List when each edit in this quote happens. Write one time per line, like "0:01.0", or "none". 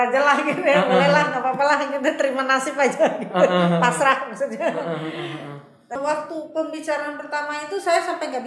0:06.0